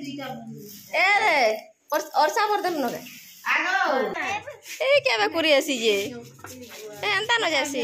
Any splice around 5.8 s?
no; 1 cut; at 4.2 s

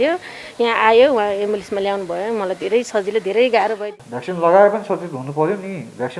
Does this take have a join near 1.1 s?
no; 1 cut; at 3.8 s

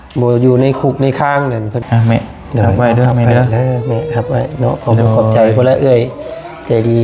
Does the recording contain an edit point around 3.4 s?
no; 1 cut; at 1.8 s

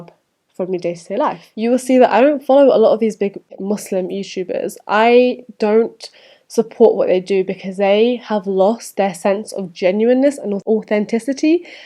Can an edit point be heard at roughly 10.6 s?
yes; 3 cuts; at 1.5 s, 3.5 s, 10.6 s

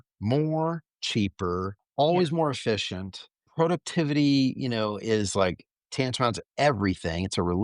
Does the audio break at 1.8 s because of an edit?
yes; 1 cut; at 1.8 s

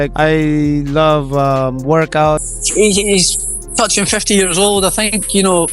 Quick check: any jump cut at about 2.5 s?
yes; 1 cut; at 2.5 s

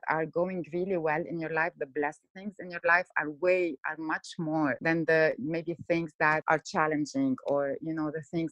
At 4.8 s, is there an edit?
yes; 2 cuts; at 4.8 s, 6.4 s

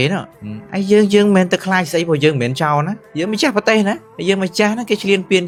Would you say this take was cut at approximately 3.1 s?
no; 0 cuts

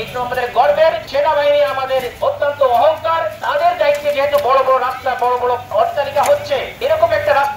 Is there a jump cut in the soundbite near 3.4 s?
yes; 5 cuts; at 1.0 s, 2.1 s, 3.4 s, 5.7 s, 6.7 s

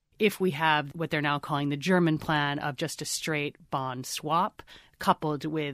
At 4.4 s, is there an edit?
no; 1 cut; at 0.9 s

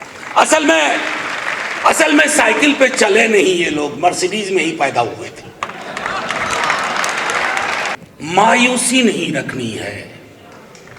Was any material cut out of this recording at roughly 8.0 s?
yes; 1 cut; at 8.0 s

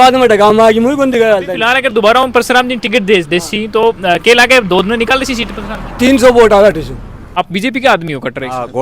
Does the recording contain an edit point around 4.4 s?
no; 2 cuts; at 1.5 s, 7.2 s

